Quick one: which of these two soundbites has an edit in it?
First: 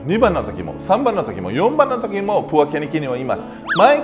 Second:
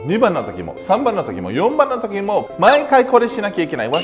second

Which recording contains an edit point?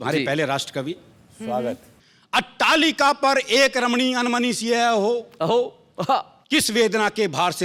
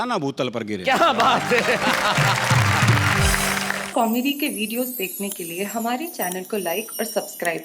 second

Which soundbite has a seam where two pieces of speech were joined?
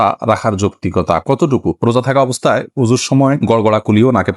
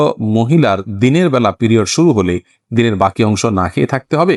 first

